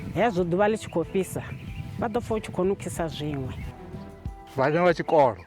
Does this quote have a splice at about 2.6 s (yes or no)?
no